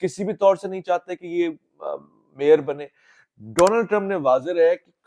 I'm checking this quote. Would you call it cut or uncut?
uncut